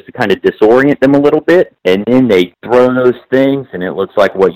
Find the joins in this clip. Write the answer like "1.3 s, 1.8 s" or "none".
1.8 s, 2.6 s